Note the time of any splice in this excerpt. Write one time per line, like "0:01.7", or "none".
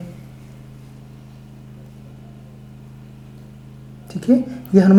none